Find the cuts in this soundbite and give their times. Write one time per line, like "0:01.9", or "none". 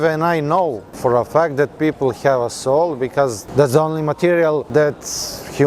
0:00.9
0:03.4
0:04.7